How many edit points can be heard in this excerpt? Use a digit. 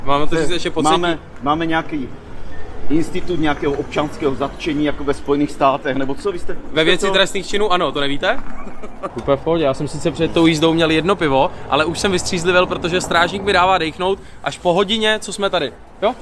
1